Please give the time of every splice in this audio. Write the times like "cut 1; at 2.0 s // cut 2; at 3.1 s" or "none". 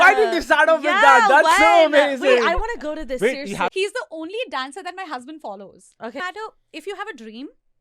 cut 1; at 3.7 s // cut 2; at 6.2 s

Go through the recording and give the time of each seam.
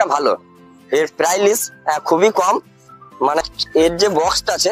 cut 1; at 3.4 s

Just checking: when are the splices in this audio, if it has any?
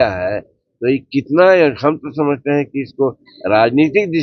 none

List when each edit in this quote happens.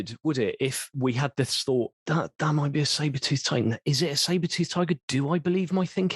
cut 1; at 0.9 s // cut 2; at 2.0 s

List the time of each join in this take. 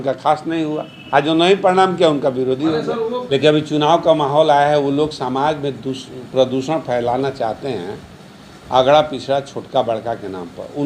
cut 1; at 3.2 s

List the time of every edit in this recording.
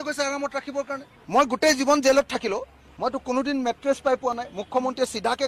cut 1; at 1.1 s

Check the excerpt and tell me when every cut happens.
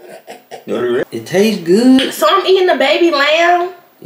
cut 1; at 1.0 s

